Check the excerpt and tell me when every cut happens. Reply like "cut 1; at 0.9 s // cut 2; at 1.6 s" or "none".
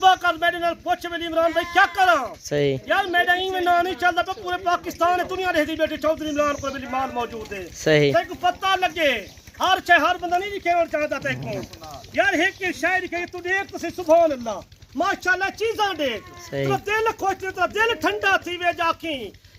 none